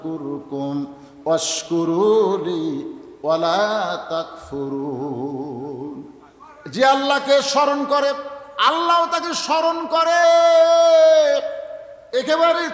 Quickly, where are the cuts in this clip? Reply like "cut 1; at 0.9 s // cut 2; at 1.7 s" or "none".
none